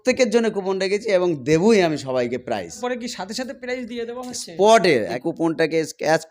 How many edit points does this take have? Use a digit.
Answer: 2